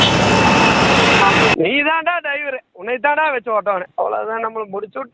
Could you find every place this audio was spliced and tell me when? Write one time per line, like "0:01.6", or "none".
0:01.5